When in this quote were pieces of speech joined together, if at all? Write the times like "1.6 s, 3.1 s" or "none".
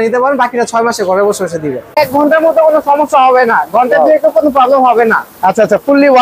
2.0 s